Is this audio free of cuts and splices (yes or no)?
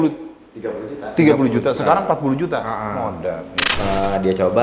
no